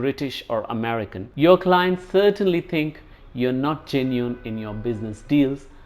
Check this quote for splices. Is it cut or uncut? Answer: cut